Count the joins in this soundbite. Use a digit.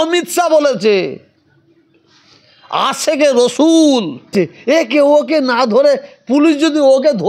1